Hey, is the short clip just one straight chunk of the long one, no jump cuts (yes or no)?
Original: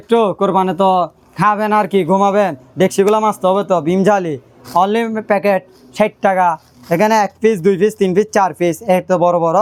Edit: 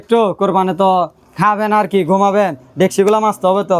yes